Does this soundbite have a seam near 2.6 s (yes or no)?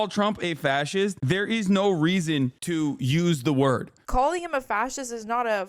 no